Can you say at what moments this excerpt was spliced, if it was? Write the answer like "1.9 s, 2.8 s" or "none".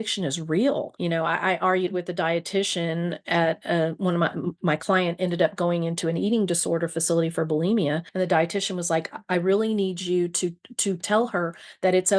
0.9 s, 8.1 s